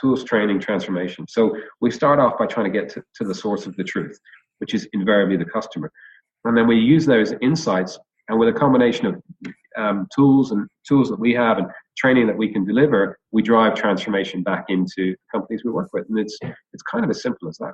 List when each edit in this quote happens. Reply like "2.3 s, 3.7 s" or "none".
none